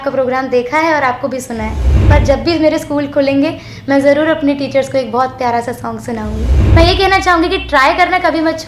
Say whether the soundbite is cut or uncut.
cut